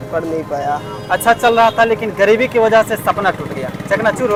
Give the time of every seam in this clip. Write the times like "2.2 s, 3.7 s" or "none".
none